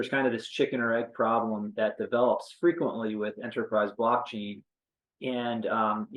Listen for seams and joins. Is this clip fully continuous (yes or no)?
yes